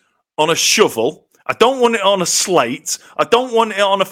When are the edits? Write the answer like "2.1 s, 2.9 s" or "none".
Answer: none